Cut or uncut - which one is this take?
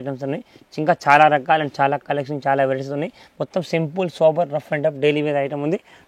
uncut